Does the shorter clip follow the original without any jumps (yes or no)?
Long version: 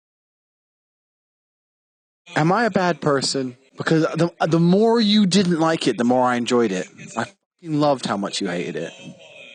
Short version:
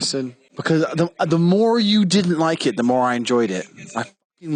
yes